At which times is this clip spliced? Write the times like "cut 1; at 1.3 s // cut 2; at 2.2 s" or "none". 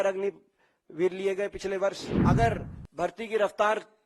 cut 1; at 2.1 s